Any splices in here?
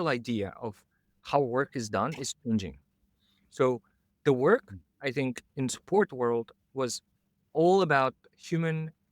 no; 0 cuts

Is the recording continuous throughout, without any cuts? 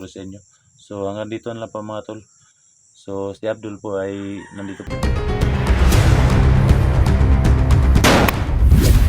no; 1 cut; at 4.8 s

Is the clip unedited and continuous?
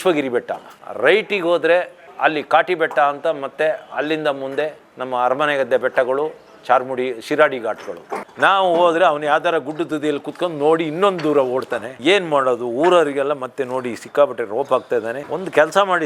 no; 2 cuts; at 8.2 s, 15.2 s

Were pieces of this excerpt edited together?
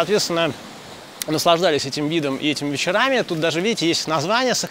no; 0 cuts

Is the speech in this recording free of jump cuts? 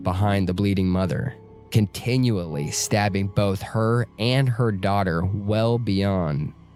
yes; 0 cuts

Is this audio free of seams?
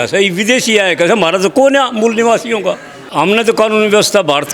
no; 1 cut; at 2.9 s

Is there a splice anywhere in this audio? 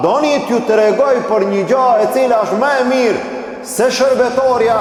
no; 0 cuts

